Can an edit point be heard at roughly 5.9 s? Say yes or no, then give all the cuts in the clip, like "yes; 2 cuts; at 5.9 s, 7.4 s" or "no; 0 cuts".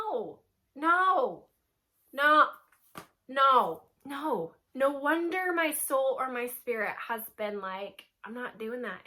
no; 0 cuts